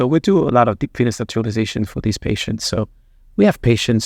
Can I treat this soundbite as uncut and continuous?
yes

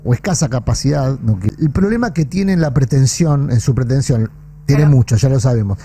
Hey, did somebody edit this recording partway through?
yes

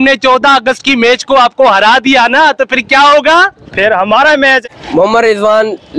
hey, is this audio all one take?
no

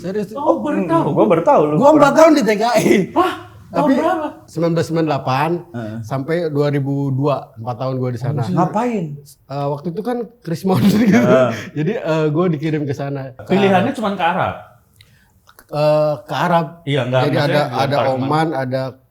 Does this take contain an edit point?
yes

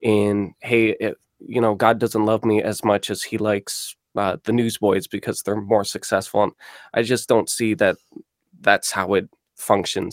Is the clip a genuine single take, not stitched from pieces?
yes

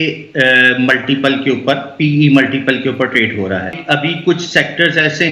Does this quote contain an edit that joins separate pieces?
yes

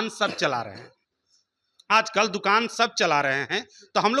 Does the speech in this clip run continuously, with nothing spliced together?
yes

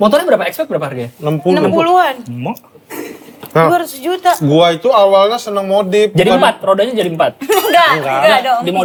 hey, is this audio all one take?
yes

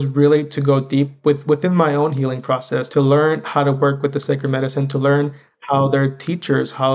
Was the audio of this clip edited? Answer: yes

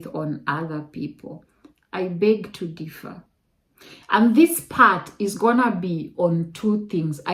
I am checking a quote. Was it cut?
no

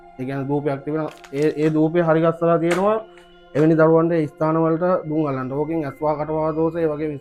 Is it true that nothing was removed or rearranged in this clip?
yes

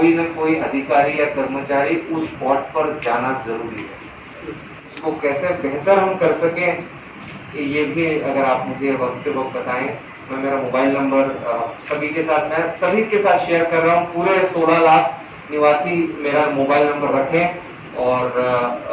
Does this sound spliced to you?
yes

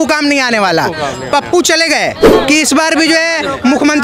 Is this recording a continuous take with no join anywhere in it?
no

